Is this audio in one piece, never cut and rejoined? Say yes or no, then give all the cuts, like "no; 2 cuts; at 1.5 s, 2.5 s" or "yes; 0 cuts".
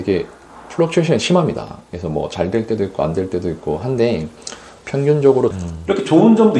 no; 1 cut; at 5.6 s